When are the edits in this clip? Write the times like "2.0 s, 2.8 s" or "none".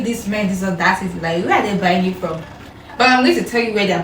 none